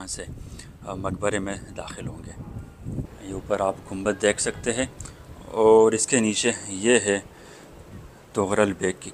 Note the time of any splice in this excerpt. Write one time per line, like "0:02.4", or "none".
0:03.0

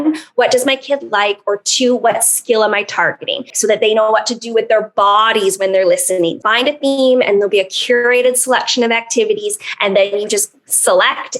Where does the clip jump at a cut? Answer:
0:03.5
0:06.4

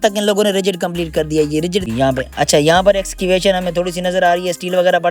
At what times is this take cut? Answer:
0:01.8

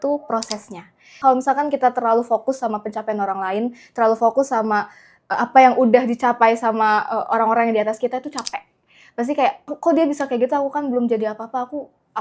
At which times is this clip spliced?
0:01.1
0:09.6

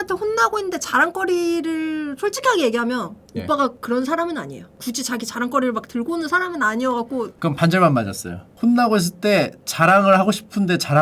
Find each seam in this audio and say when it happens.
0:04.7
0:07.3

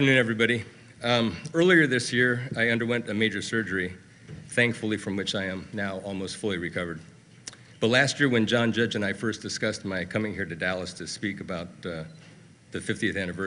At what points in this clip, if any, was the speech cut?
0:03.2

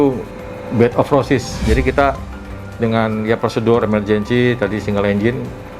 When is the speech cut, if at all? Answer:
0:01.6

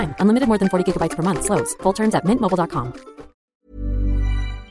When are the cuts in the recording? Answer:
0:03.5

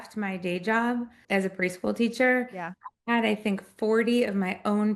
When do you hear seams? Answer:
none

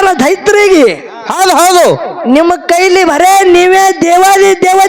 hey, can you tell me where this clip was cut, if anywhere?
none

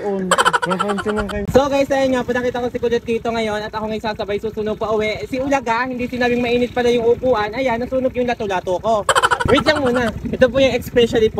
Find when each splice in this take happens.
0:01.5
0:09.3

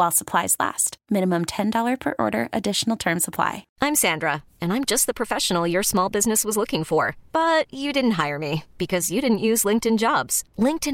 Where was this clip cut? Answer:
0:03.6

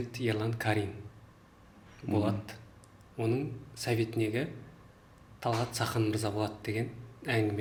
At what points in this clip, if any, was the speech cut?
none

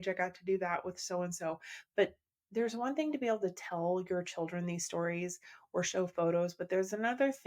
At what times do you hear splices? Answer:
none

